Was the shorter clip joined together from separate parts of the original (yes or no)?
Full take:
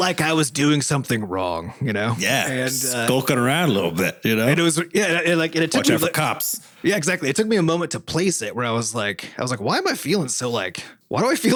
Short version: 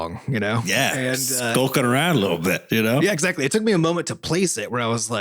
yes